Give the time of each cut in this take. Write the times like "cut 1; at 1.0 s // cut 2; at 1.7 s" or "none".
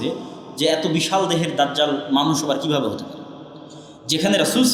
none